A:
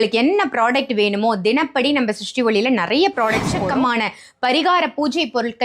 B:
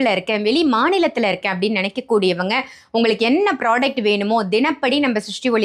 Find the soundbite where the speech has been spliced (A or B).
A